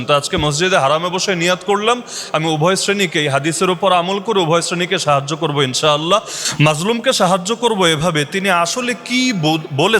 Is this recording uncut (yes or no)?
yes